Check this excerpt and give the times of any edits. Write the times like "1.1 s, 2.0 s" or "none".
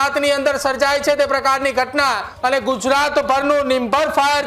2.3 s

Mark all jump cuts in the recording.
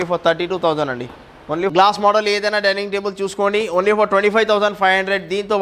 1.7 s

